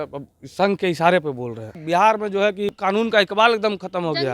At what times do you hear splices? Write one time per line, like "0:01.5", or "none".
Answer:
0:01.8
0:02.8